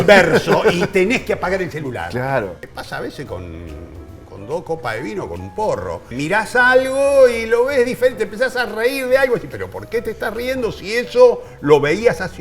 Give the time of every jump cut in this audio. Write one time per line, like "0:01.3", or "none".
0:02.6
0:06.1